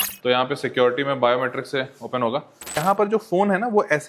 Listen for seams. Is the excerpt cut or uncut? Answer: cut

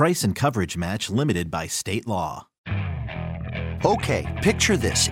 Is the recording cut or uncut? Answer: cut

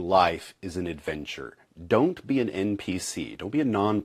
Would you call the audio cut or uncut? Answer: uncut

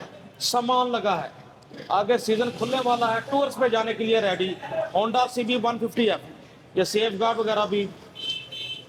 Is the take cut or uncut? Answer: uncut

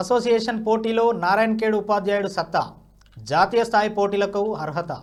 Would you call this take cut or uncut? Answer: uncut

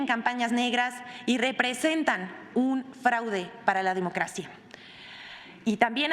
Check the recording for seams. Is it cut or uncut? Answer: uncut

